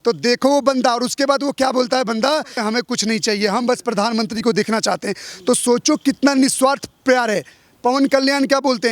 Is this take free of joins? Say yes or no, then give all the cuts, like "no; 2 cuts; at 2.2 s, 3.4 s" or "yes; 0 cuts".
no; 1 cut; at 2.6 s